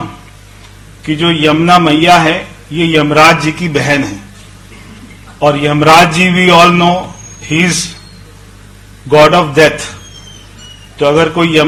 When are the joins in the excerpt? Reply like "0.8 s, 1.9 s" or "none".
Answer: none